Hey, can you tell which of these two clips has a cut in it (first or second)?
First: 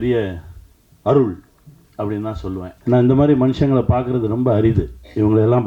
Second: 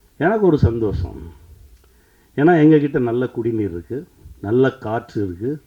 first